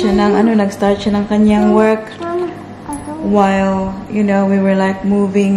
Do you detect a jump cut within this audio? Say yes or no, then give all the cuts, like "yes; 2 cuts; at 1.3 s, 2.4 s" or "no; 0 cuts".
no; 0 cuts